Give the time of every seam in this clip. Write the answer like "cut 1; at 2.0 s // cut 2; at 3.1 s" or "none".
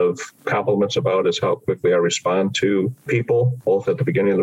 none